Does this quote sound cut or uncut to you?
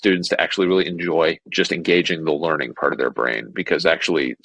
cut